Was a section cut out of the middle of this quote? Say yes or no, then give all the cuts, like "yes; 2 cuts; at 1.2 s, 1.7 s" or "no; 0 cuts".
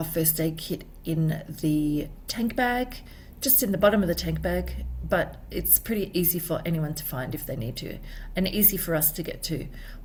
no; 0 cuts